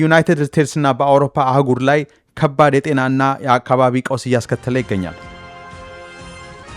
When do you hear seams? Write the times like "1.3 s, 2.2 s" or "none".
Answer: 5.5 s

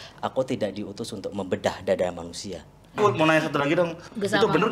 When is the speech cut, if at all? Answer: 3.0 s

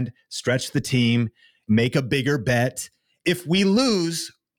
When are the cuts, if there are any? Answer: 1.6 s, 3.2 s

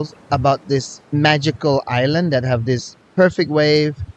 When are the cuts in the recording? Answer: 1.0 s, 3.0 s

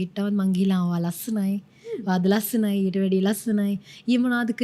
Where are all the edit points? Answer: none

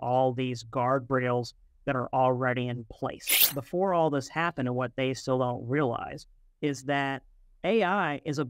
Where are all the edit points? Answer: 3.5 s

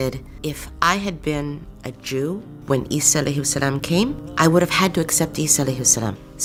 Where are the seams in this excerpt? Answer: none

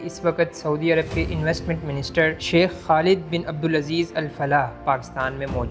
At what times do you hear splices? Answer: 2.4 s

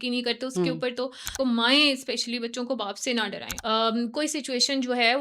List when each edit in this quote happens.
1.4 s, 3.5 s

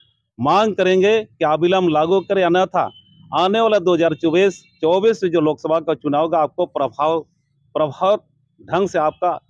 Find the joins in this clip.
none

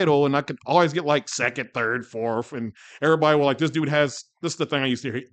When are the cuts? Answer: none

